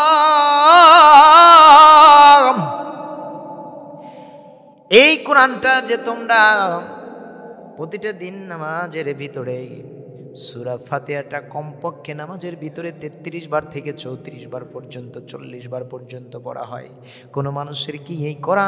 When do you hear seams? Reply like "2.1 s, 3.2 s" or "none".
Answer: none